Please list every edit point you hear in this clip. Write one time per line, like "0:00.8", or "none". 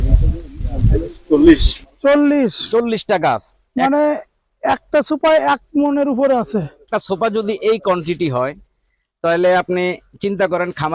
0:06.9